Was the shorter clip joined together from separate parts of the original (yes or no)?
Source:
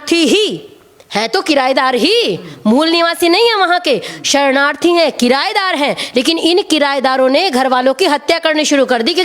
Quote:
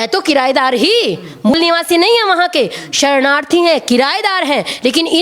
yes